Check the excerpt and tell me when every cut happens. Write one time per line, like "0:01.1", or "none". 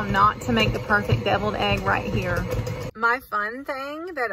0:02.9